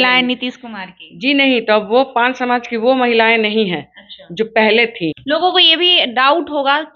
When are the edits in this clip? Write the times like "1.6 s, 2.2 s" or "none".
5.2 s

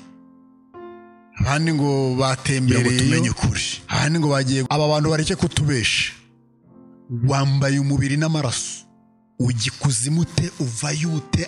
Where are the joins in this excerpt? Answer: 4.7 s

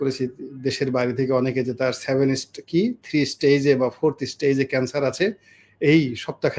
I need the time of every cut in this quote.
none

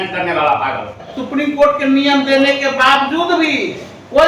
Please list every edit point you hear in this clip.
1.2 s

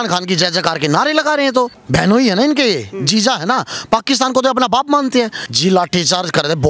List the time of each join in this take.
1.8 s, 5.4 s

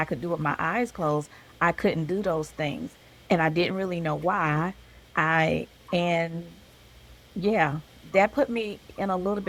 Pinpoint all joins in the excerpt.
none

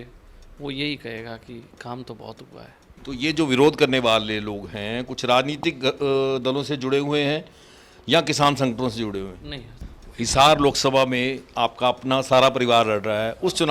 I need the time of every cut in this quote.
3.0 s, 9.9 s

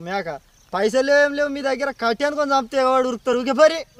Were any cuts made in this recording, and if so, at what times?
none

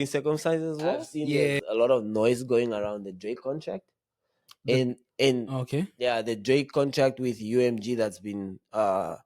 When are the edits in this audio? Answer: 1.6 s

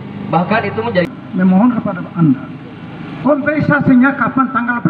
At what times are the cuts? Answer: 1.0 s

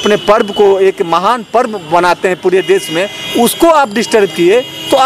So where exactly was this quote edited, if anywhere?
none

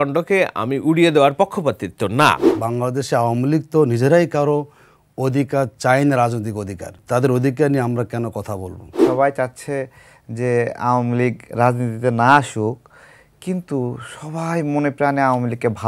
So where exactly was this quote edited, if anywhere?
2.5 s, 7.0 s, 9.0 s

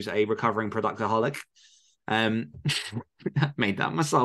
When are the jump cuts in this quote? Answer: none

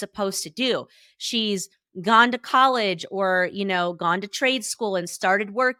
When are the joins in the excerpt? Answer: none

